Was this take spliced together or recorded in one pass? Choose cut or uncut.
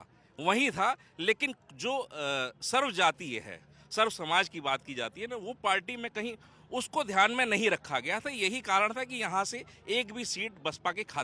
uncut